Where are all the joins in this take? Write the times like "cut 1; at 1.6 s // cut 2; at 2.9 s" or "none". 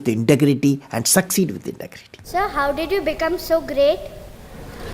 cut 1; at 2.3 s